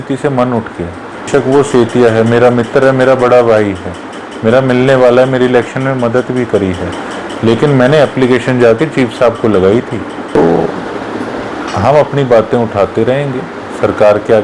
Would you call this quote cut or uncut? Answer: cut